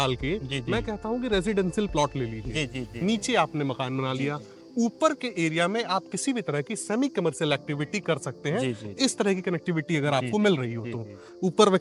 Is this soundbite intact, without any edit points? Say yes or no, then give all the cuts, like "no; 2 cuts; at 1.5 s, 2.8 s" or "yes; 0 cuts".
yes; 0 cuts